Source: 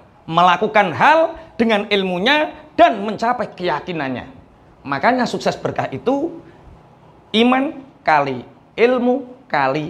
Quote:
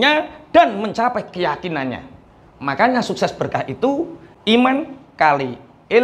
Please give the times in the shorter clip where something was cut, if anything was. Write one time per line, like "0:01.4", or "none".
0:04.2